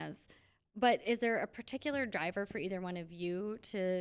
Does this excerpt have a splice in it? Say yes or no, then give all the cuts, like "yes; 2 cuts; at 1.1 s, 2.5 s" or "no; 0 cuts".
no; 0 cuts